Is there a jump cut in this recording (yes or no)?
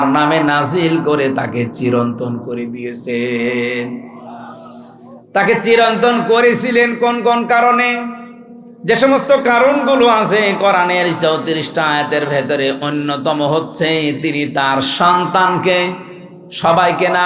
no